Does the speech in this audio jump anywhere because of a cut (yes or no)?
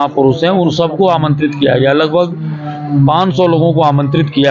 no